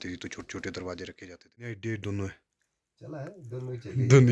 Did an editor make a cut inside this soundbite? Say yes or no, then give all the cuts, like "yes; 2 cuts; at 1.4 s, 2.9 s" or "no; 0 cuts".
yes; 1 cut; at 1.7 s